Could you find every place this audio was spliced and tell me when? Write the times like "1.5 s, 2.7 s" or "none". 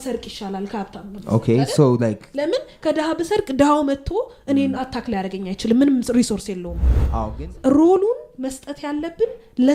7.0 s